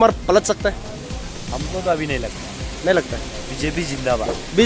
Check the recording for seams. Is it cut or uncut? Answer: uncut